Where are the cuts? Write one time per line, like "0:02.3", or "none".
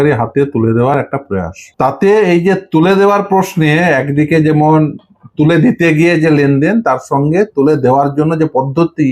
0:01.6